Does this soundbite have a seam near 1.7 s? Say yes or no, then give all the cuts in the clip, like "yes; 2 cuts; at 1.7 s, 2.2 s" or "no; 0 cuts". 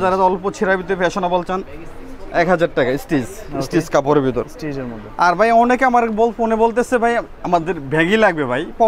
no; 0 cuts